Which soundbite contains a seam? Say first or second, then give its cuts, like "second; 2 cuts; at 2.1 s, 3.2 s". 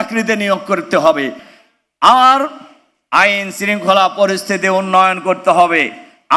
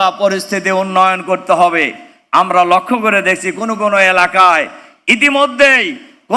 first; 1 cut; at 1.5 s